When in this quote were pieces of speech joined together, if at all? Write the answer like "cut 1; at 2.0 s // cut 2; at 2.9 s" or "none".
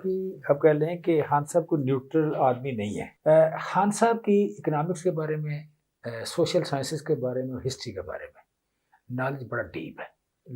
cut 1; at 3.0 s